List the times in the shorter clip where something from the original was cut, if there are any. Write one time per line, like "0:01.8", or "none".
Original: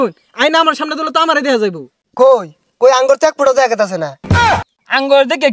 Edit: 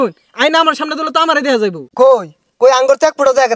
0:01.8